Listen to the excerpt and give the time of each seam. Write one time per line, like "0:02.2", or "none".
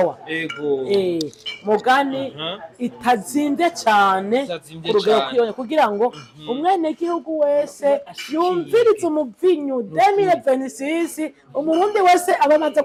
none